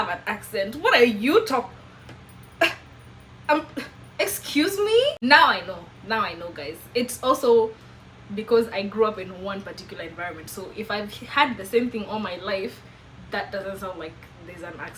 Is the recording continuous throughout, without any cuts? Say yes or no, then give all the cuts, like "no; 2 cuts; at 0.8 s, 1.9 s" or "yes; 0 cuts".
yes; 0 cuts